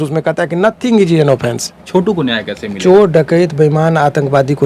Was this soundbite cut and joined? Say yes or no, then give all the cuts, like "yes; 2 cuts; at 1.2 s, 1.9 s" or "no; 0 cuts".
yes; 1 cut; at 1.8 s